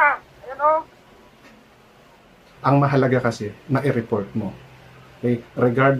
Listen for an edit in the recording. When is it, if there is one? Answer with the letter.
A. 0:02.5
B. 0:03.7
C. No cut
A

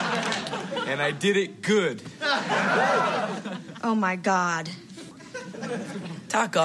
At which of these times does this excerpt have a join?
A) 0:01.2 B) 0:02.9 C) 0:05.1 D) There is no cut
C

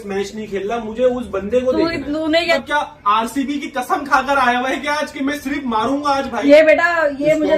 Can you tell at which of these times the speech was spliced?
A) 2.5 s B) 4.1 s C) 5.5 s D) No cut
A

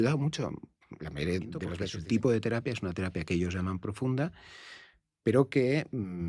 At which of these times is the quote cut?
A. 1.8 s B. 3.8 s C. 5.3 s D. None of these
A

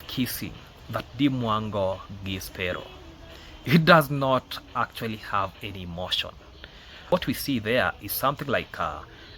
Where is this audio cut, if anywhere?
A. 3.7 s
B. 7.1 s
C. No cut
B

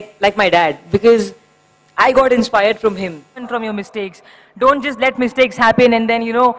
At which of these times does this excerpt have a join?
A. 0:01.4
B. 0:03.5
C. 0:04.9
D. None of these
B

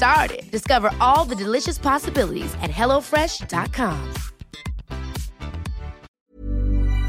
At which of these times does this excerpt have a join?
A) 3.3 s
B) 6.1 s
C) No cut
B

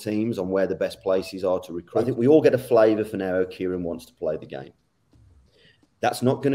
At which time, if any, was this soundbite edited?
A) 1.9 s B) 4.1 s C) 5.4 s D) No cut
A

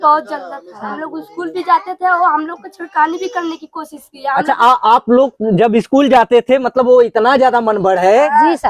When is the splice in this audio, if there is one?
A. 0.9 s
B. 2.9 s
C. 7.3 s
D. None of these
A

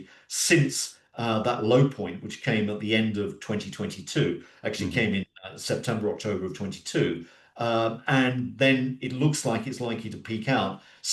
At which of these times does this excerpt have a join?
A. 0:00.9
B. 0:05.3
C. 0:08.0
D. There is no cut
D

